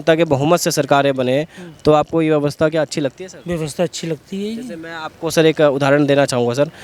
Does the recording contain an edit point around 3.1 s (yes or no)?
no